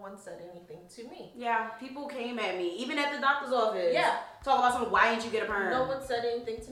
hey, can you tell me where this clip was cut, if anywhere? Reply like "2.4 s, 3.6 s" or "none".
none

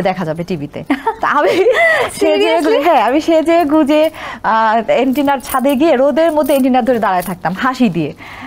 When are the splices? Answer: none

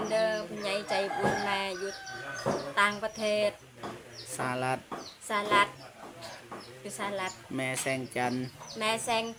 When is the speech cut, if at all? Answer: none

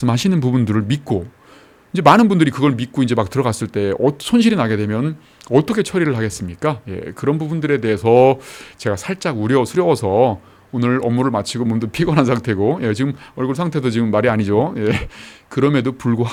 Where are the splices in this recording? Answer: none

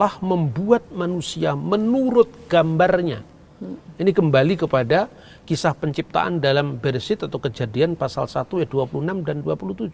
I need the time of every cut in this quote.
none

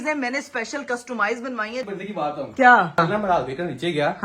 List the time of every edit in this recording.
1.8 s, 3.0 s

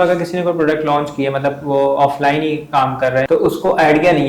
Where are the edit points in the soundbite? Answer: 3.3 s

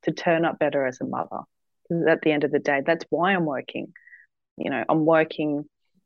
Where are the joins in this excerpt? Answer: none

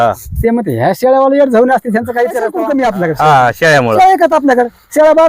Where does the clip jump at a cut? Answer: 2.5 s

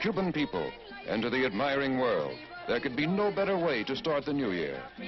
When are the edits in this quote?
1.6 s

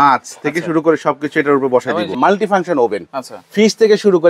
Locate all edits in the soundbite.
2.2 s

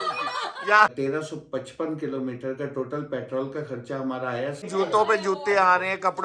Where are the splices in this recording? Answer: 0.9 s, 4.6 s

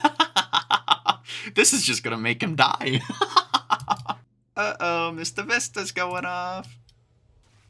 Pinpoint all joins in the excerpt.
4.4 s

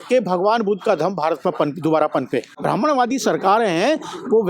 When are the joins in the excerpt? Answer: 2.5 s

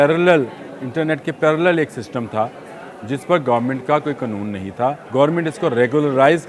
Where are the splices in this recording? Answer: 5.0 s

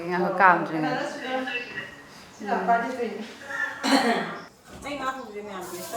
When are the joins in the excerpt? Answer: 4.4 s

